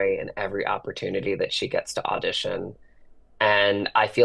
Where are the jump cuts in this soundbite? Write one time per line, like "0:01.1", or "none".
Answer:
none